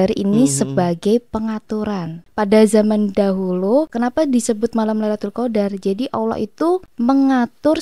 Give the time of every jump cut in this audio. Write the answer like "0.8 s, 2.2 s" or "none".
2.2 s, 3.9 s, 6.9 s

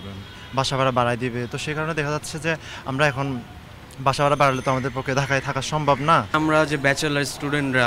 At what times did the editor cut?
none

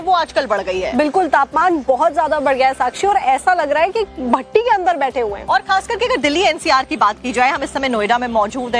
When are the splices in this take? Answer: 3.4 s

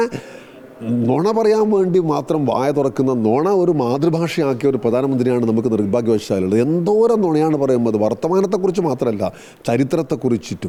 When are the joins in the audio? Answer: none

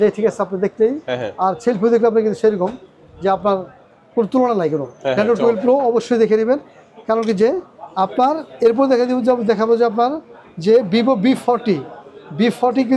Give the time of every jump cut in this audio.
none

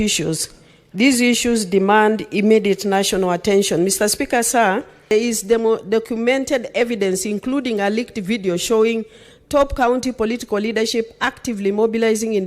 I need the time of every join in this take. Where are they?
5.1 s

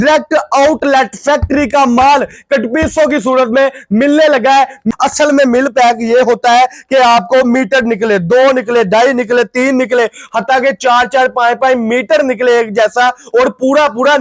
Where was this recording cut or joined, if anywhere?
4.9 s

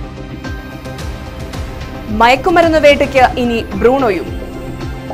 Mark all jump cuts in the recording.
none

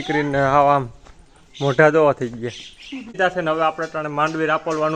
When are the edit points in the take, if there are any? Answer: 3.2 s

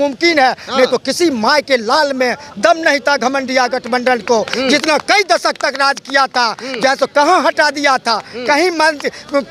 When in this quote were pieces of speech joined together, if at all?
none

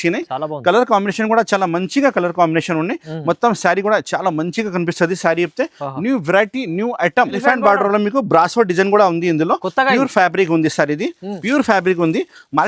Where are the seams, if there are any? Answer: 7.4 s

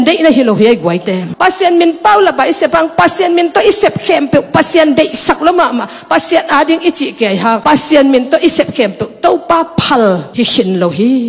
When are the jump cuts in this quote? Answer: 1.3 s

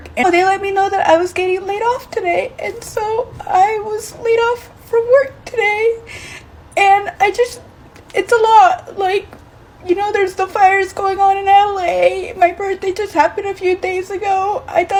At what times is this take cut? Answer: none

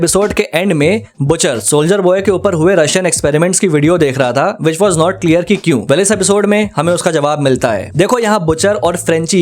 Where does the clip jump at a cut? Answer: none

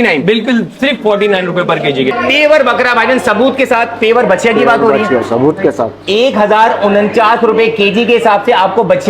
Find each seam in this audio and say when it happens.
2.2 s

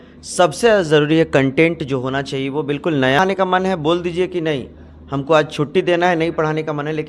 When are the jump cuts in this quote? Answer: 3.2 s

